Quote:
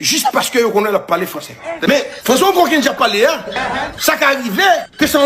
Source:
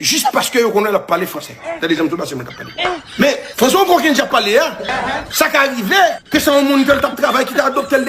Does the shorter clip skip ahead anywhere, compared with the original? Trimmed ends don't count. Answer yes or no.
yes